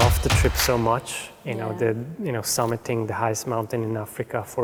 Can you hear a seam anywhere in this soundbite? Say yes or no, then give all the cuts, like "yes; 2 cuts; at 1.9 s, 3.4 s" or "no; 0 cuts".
no; 0 cuts